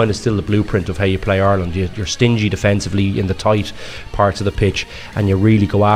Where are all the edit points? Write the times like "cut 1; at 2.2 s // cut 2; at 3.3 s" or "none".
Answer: none